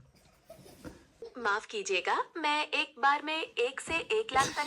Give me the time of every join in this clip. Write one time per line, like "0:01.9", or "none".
0:01.2